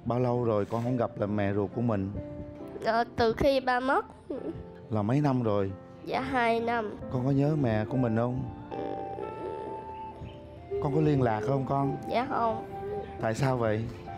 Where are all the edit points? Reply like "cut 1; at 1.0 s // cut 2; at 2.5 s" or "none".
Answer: none